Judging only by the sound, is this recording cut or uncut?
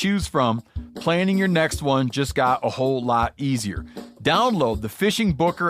uncut